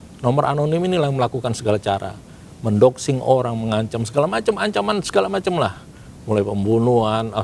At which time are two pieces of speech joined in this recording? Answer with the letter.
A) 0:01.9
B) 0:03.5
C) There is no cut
C